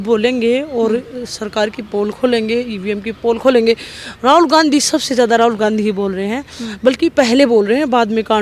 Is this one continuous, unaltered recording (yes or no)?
yes